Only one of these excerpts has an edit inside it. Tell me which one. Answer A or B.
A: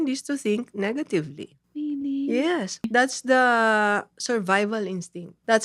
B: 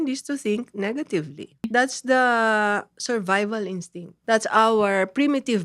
B